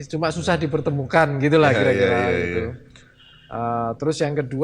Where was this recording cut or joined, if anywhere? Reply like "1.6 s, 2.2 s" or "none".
none